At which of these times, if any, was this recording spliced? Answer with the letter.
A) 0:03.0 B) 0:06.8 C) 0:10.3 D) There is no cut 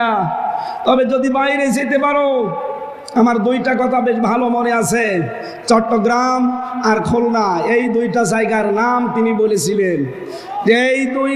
D